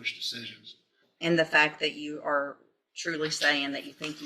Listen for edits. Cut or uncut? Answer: cut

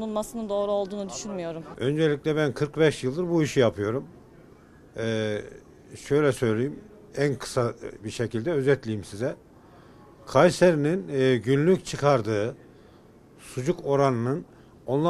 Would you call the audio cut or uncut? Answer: uncut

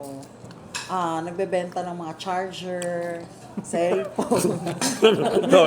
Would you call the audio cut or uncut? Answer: cut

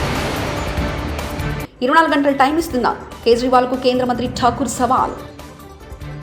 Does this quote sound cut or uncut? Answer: uncut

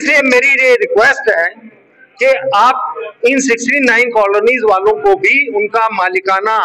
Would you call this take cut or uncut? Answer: uncut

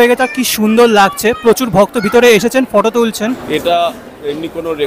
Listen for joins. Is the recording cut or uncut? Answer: cut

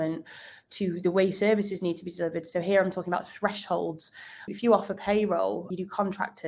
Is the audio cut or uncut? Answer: cut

